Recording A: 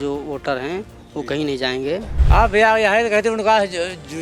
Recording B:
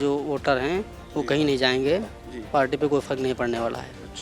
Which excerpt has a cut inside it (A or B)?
A